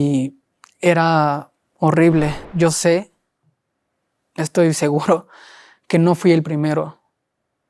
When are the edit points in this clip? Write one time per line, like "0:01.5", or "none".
0:02.4